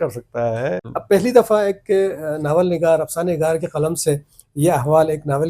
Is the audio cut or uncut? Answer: cut